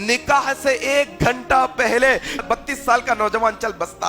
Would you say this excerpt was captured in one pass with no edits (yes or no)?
no